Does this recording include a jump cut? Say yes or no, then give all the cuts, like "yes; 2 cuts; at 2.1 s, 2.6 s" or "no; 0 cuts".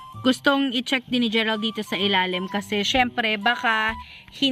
no; 0 cuts